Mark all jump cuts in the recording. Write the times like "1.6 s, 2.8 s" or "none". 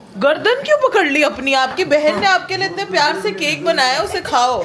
none